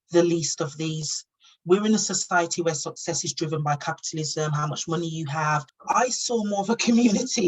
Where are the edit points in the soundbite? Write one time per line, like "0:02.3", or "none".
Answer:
0:05.7